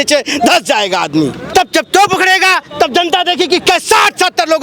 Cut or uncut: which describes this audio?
cut